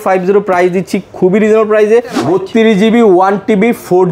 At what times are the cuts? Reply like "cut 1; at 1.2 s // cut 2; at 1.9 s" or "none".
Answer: cut 1; at 2.2 s